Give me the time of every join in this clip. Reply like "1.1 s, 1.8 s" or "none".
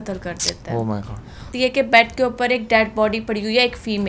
1.5 s